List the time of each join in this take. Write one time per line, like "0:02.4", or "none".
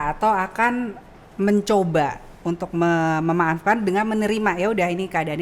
none